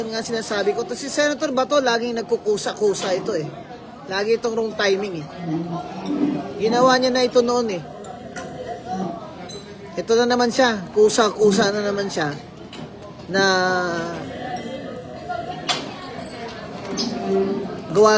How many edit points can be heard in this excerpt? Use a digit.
0